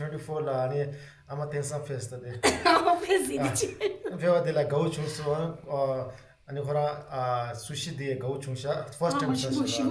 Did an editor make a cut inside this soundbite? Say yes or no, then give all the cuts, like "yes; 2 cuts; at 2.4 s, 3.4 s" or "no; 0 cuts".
no; 0 cuts